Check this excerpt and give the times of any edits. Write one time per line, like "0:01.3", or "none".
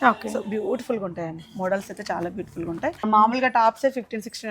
0:03.0